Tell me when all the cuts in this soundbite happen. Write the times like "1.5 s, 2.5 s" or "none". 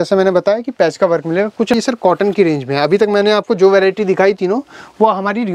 1.7 s